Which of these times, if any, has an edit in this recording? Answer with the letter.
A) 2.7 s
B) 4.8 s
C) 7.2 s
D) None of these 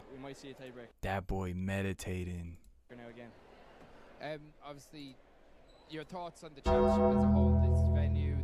D